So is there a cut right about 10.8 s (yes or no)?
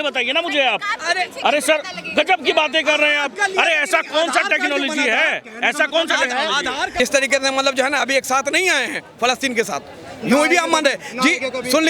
no